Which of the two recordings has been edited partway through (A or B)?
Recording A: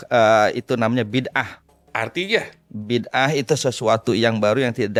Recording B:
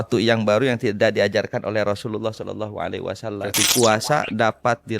B